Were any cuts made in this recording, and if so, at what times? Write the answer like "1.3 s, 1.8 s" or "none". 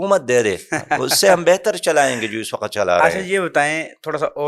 none